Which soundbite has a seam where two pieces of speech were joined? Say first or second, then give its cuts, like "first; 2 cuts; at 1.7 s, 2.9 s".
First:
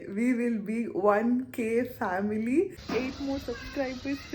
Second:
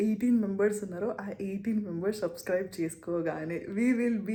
first; 1 cut; at 2.8 s